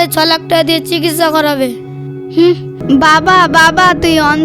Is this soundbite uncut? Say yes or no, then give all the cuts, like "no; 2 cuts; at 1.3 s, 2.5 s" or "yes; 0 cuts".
no; 1 cut; at 2.7 s